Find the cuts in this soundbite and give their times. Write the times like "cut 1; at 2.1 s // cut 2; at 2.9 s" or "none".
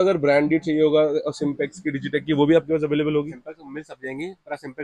none

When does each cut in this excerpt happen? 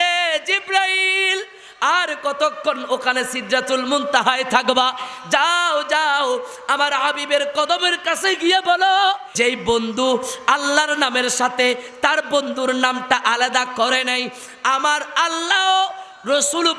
cut 1; at 9.2 s

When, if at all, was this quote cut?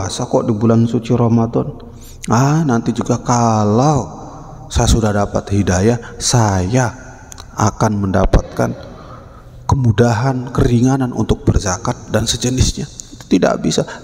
none

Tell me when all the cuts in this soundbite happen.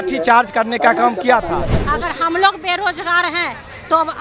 cut 1; at 1.8 s

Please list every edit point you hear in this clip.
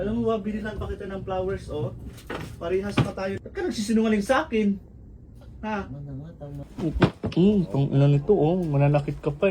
cut 1; at 3.4 s // cut 2; at 6.6 s

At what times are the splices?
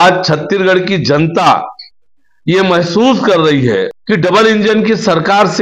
cut 1; at 4.0 s

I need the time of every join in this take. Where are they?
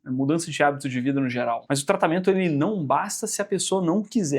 cut 1; at 1.6 s

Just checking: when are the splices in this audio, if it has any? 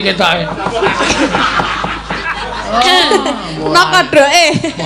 cut 1; at 2.3 s

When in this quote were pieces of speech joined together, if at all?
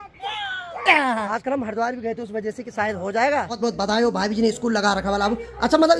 cut 1; at 1.3 s // cut 2; at 3.5 s

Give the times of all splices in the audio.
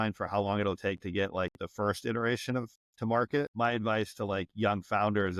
cut 1; at 3.2 s

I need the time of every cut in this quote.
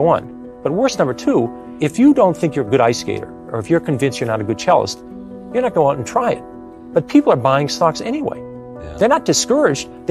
cut 1; at 1.6 s

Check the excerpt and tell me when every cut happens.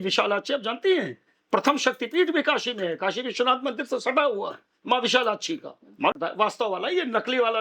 cut 1; at 6.1 s

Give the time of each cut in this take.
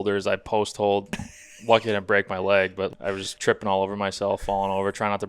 cut 1; at 1.1 s // cut 2; at 2.9 s

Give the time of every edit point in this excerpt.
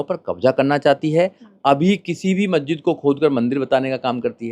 none

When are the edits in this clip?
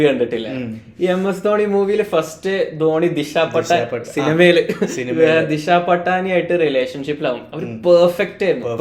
none

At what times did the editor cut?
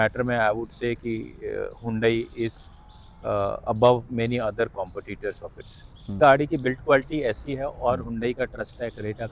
cut 1; at 6.1 s

